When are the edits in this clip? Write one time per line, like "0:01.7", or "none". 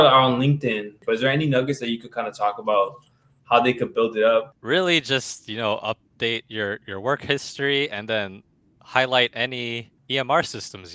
0:00.9
0:04.5
0:09.9